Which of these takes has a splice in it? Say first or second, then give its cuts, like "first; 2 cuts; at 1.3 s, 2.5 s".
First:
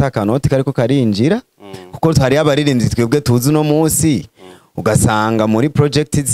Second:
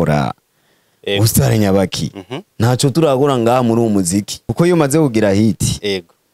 second; 1 cut; at 4.4 s